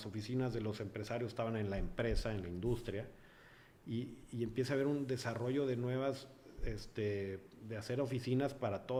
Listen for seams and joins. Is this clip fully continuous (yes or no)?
yes